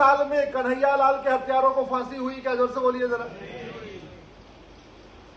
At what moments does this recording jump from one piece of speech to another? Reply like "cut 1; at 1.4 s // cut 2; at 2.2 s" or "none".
none